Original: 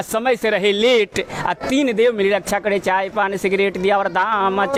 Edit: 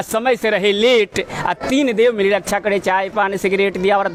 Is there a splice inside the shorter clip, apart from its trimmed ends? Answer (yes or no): no